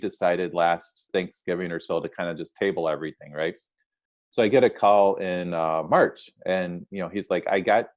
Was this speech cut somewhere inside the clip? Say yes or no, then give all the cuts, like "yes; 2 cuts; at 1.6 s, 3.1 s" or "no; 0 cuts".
yes; 1 cut; at 1.1 s